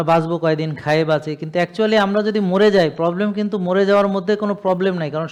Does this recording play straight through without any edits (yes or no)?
yes